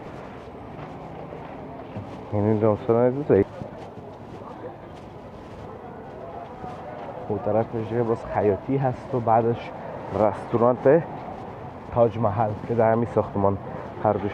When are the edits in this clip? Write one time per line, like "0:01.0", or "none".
0:03.5